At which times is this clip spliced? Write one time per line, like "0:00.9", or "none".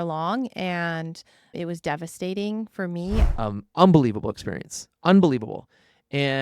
0:03.3